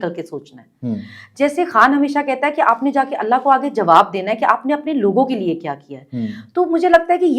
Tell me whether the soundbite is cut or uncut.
uncut